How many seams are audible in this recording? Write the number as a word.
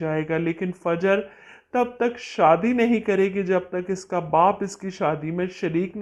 zero